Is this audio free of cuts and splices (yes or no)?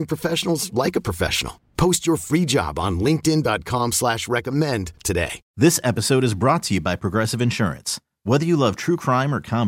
yes